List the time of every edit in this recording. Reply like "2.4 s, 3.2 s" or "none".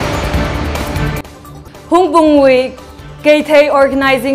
0.9 s